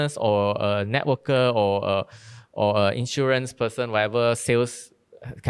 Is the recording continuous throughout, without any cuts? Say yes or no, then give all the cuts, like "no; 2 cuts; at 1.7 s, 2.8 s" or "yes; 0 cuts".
yes; 0 cuts